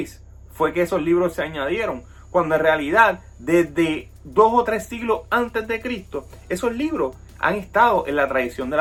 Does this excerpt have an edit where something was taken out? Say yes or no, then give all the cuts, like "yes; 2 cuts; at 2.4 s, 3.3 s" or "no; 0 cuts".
no; 0 cuts